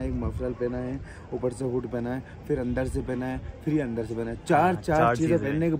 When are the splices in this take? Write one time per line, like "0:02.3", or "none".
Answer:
none